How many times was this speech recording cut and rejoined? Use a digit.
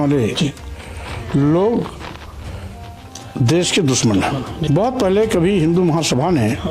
1